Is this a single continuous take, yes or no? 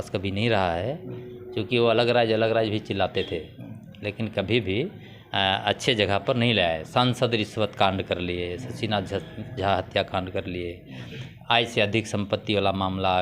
yes